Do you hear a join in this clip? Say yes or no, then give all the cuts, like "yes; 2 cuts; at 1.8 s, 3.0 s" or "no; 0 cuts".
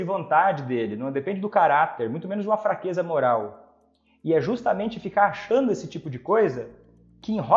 no; 0 cuts